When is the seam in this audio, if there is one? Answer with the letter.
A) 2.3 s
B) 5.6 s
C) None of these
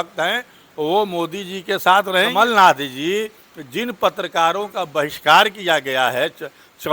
A